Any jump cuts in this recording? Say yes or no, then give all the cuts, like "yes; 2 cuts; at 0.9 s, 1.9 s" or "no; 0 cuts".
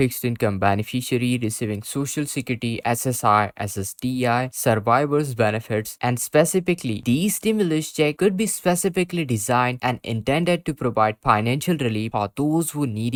no; 0 cuts